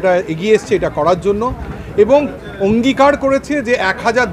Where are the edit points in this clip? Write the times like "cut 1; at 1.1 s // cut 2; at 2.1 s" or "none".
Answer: none